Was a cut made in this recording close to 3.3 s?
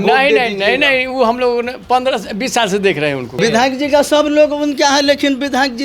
yes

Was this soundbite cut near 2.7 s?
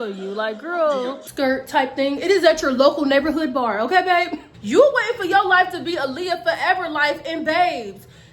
no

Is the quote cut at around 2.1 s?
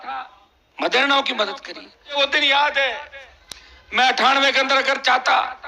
yes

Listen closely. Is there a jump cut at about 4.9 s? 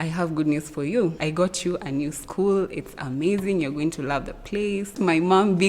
yes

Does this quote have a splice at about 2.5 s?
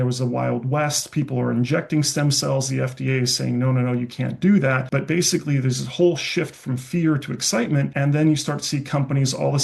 no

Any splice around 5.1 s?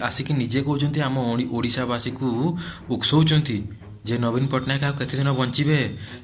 no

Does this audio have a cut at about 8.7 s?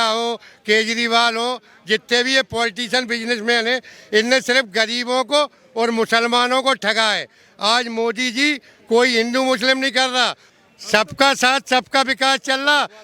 no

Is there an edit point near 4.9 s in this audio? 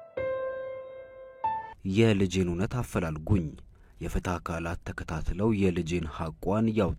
no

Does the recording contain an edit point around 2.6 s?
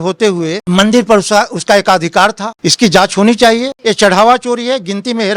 yes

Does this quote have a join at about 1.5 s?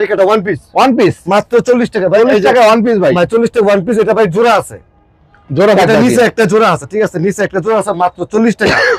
no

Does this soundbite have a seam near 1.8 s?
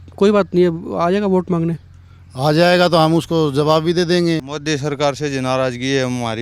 no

